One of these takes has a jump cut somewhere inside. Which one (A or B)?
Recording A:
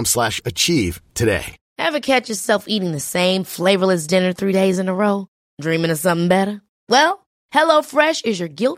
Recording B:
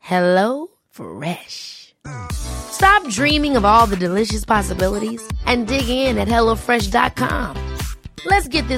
A